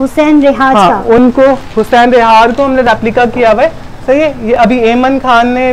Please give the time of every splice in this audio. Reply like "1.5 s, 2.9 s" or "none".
none